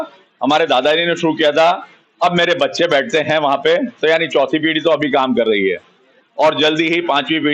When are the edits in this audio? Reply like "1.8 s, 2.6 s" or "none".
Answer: none